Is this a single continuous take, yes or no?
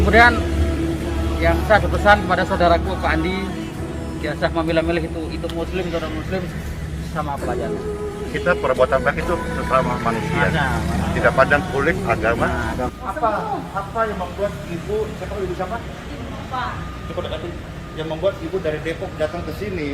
no